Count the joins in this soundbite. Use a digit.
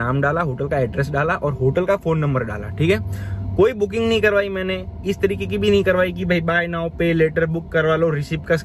0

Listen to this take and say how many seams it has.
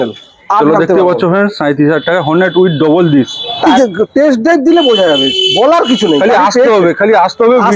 1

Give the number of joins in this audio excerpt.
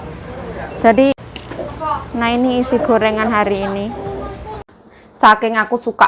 2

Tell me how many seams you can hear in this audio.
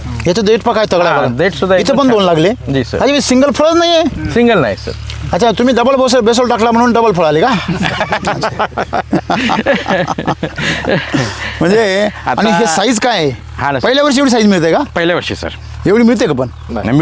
0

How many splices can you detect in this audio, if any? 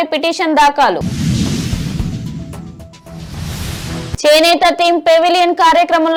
0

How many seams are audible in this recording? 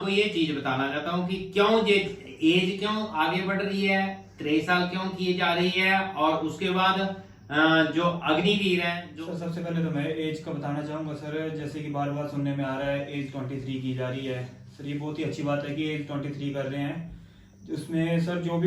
1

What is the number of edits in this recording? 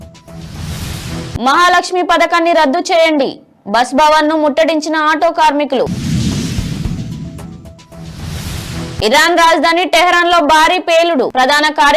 1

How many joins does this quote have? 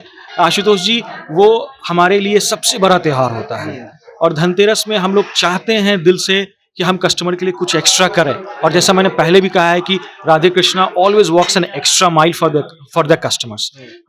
0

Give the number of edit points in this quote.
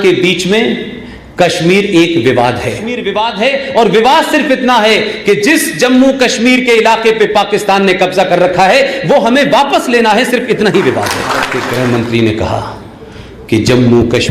2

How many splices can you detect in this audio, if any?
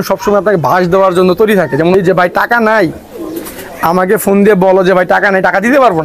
1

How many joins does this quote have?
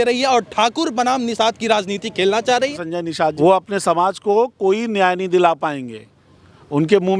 1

